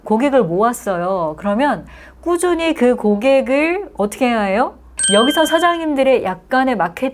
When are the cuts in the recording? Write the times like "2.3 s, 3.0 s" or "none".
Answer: 4.9 s